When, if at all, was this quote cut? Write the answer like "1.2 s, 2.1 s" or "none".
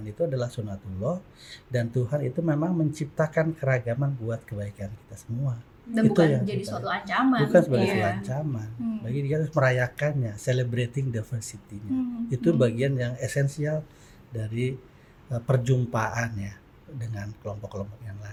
none